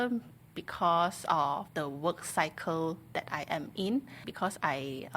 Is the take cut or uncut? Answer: cut